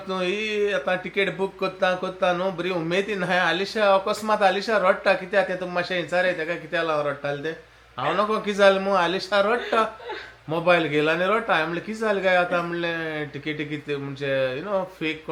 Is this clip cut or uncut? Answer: uncut